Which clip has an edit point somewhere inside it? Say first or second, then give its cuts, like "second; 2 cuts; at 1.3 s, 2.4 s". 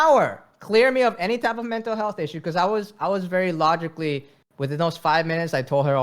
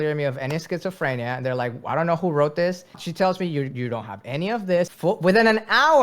second; 2 cuts; at 3.0 s, 4.9 s